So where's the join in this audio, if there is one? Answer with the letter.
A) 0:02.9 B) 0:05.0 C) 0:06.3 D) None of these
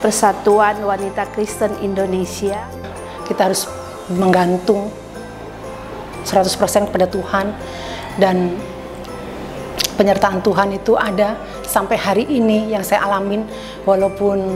A